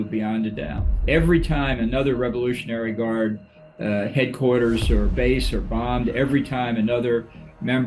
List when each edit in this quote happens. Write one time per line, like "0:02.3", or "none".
0:01.0

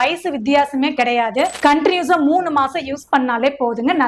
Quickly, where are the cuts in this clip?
0:01.5

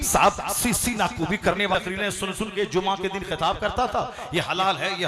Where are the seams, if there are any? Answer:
0:01.7

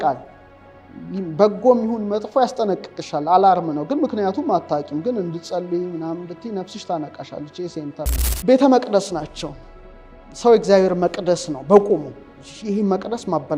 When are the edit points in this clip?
0:08.3

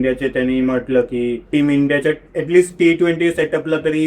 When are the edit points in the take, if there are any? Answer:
0:01.4

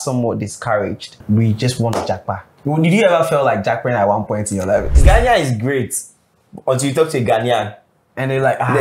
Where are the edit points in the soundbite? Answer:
0:01.2
0:02.5
0:05.0

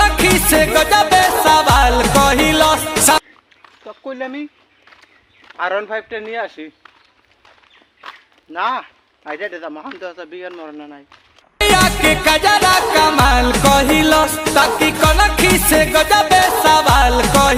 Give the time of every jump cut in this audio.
none

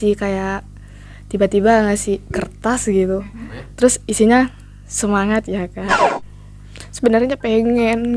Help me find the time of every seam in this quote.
0:05.9

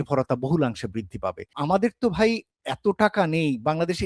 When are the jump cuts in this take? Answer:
0:01.4

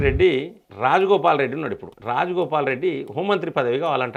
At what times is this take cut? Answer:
none

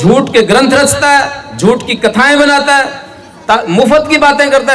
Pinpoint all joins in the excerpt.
none

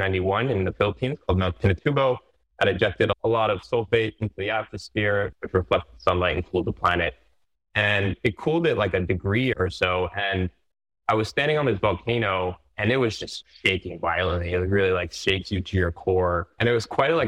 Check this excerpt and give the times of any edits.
none

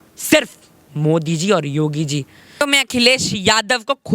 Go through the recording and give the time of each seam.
0:02.6

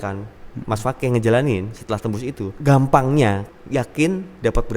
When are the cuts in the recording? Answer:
0:02.5
0:03.5

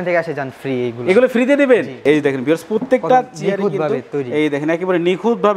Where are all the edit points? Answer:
0:01.9

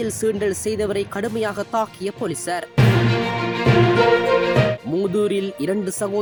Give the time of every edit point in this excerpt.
none

